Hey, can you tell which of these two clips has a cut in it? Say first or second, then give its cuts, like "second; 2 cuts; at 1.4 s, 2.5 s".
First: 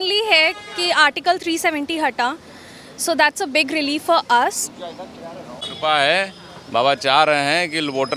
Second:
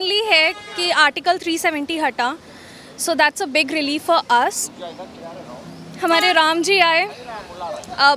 first; 1 cut; at 5.6 s